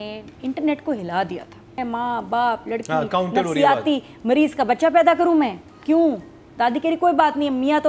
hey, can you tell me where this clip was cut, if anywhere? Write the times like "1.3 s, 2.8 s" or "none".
1.8 s